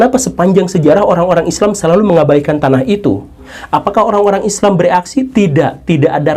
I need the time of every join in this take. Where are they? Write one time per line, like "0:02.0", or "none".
0:03.5

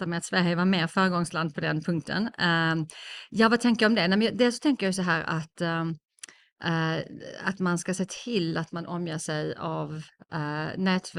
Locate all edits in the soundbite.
none

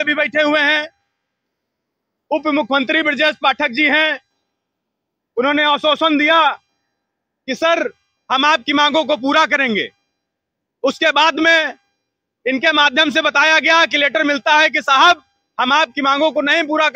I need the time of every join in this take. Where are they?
none

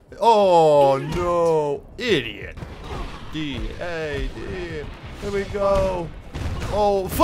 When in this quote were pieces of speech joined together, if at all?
0:02.5

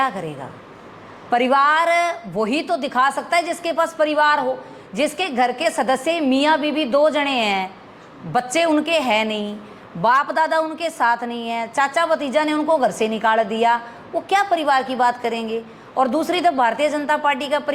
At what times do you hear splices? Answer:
none

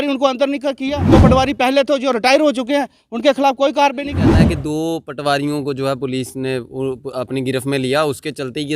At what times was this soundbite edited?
0:01.0
0:04.2

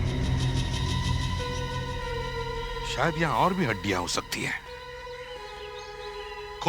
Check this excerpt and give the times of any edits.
none

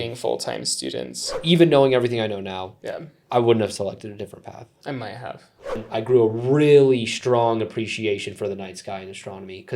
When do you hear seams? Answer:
0:01.3
0:05.8

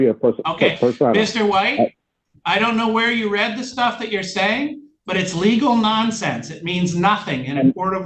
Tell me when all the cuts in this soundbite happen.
none

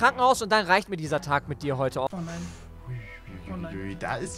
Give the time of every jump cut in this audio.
none

